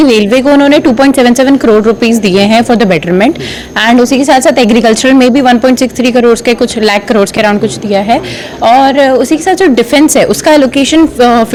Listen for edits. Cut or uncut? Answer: uncut